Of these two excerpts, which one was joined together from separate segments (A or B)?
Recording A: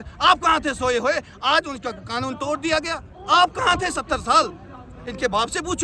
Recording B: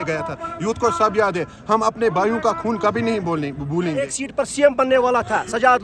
B